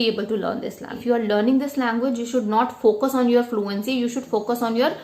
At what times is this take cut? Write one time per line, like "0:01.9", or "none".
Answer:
0:01.0

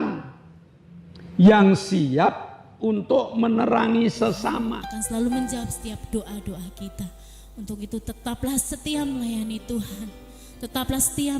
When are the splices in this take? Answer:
0:04.8

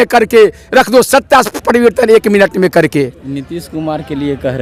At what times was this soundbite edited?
none

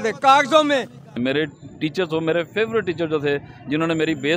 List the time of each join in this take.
0:01.1

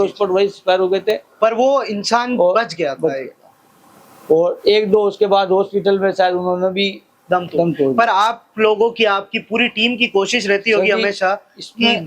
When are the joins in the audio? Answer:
none

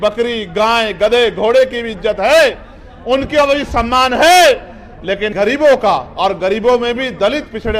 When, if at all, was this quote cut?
0:05.3

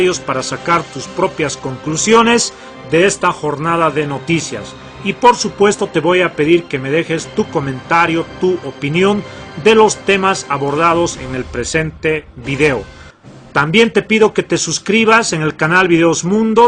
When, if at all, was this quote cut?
0:02.0

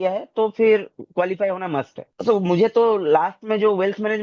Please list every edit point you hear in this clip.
none

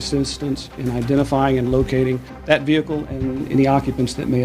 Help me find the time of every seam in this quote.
0:02.3

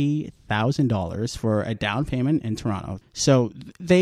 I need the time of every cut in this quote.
0:02.9

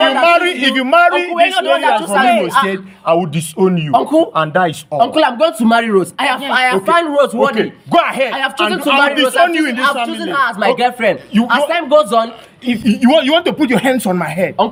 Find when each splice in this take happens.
none

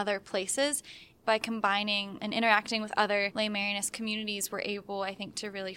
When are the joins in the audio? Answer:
0:01.1
0:02.1
0:03.3

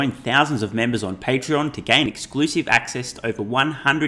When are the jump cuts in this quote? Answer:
none

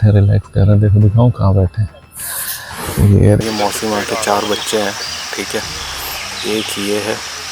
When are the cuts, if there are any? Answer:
0:03.4

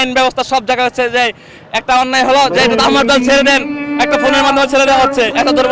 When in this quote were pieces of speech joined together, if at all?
none

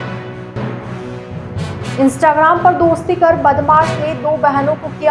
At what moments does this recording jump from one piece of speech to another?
0:01.9

